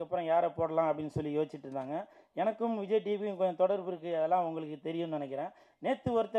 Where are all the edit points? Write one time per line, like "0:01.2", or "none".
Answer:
none

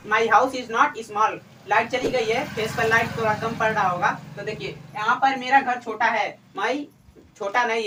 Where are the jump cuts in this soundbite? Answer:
none

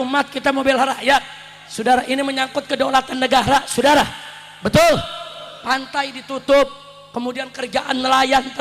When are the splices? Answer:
none

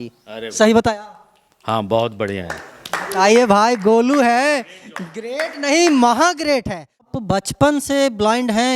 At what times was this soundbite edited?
0:07.2

